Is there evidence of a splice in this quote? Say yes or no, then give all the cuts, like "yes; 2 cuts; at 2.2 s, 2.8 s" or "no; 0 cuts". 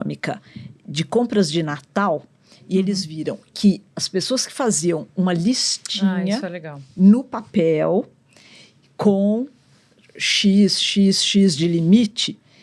no; 0 cuts